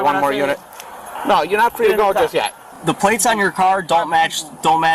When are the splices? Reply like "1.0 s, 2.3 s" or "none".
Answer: 2.7 s